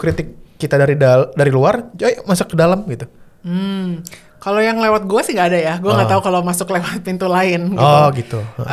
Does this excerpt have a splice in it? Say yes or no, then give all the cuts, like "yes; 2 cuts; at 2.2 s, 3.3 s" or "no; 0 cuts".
no; 0 cuts